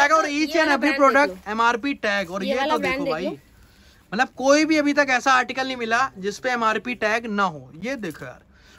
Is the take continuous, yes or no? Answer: yes